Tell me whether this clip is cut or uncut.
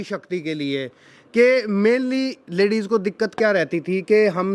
uncut